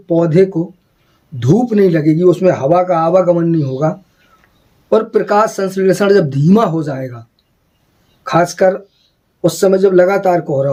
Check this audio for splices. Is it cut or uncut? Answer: uncut